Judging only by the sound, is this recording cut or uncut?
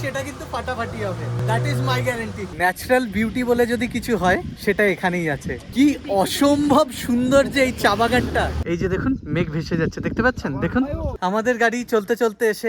cut